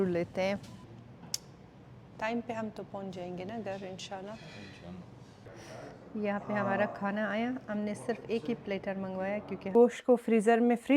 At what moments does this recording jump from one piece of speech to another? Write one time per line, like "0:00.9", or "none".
0:00.8
0:05.4
0:09.7

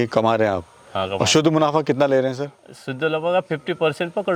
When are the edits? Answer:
none

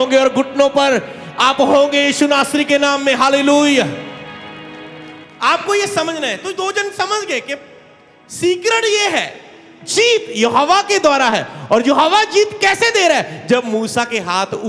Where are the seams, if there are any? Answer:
0:05.3

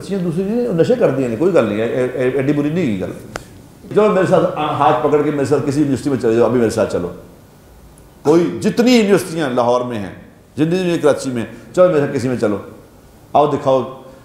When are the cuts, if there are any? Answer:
0:03.9

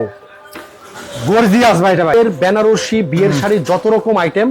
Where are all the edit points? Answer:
0:02.1

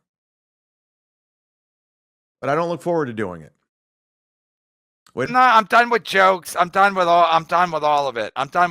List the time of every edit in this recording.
0:05.3

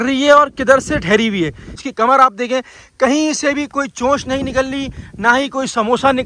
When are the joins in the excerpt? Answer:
0:01.9

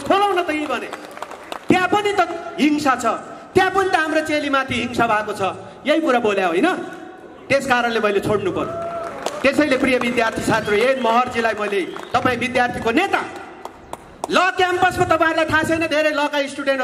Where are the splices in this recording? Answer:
none

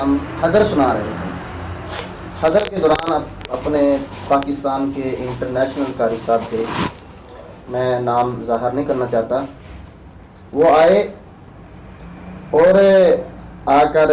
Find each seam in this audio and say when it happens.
none

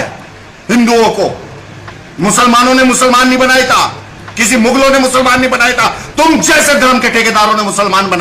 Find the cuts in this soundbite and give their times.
none

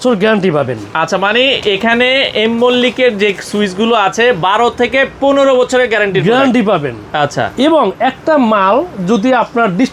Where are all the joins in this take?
none

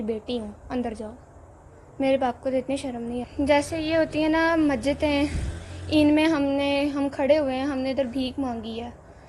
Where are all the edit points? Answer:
0:03.1

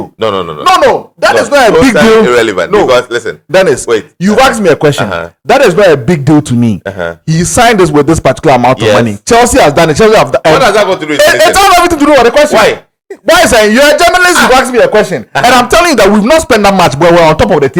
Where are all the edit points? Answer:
none

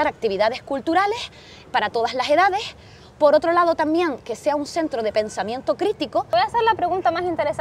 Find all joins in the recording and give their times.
0:06.3

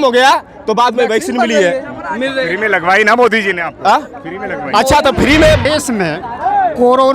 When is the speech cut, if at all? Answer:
0:05.7

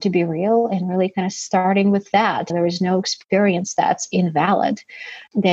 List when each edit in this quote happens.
0:02.5

